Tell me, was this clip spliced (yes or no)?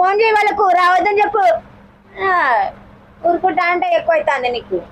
no